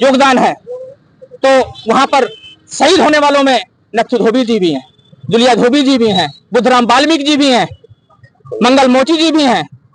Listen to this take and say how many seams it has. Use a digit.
0